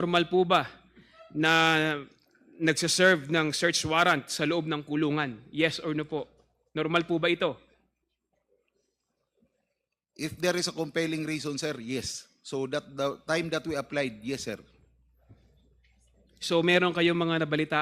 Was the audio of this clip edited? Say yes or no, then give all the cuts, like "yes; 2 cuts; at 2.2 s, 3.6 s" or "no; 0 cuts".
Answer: no; 0 cuts